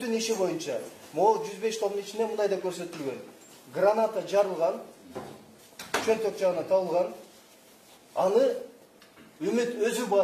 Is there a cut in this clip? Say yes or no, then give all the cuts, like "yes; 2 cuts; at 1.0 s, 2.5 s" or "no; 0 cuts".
no; 0 cuts